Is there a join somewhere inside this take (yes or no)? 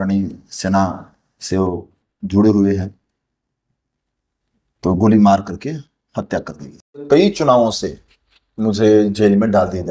yes